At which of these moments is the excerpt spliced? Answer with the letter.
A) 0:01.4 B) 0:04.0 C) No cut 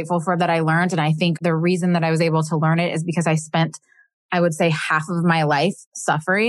A